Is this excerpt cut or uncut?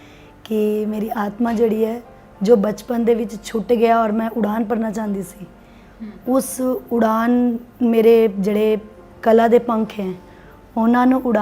uncut